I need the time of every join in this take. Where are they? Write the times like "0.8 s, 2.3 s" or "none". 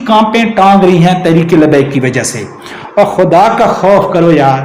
2.7 s